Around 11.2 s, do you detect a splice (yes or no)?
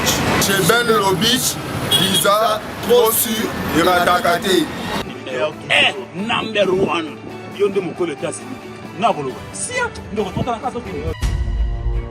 yes